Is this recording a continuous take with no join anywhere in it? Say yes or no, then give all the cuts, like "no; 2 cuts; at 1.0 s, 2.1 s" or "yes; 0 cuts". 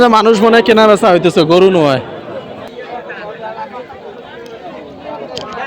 no; 1 cut; at 2.7 s